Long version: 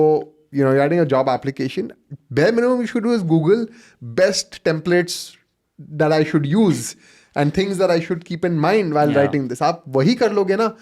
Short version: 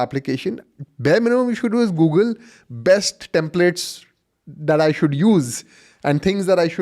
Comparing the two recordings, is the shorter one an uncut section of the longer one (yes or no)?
yes